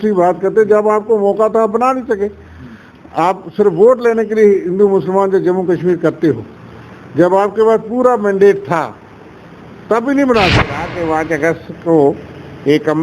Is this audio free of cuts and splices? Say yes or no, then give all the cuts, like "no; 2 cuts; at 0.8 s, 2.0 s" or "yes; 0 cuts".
no; 1 cut; at 10.9 s